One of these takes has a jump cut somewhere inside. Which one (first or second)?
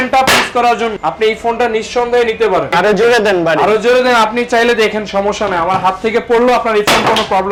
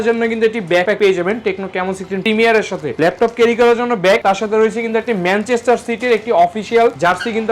second